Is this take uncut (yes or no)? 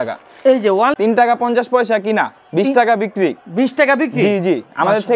no